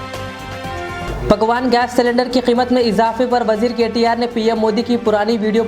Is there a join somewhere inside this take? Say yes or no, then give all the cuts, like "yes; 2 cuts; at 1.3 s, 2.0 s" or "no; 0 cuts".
yes; 1 cut; at 1.1 s